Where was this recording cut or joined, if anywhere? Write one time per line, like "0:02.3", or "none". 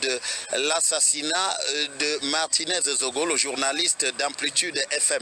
0:02.2
0:04.2